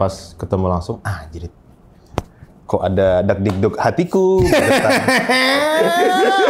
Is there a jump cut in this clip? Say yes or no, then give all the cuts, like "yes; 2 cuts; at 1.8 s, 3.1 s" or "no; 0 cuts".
no; 0 cuts